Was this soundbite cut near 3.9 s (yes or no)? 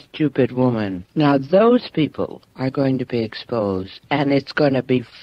no